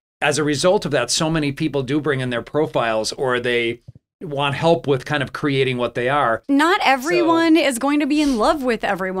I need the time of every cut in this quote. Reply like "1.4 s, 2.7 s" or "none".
6.4 s